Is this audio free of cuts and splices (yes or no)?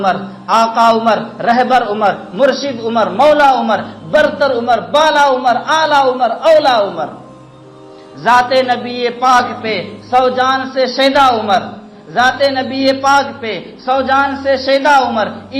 yes